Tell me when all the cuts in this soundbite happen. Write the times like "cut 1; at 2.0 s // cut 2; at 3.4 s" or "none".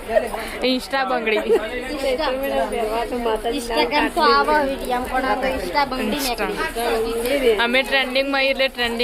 none